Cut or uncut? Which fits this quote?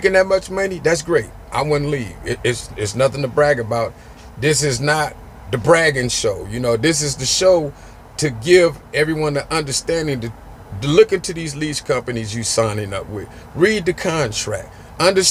uncut